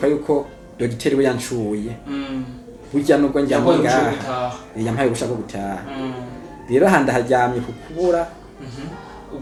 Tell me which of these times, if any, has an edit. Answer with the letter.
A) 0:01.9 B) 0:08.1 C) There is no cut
C